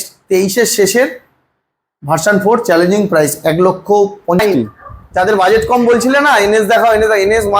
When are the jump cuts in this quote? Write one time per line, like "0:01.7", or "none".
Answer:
0:04.4

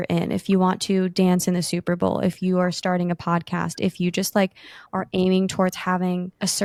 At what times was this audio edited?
none

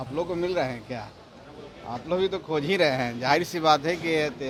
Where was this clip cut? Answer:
none

